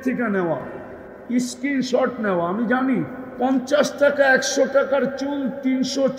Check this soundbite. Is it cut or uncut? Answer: cut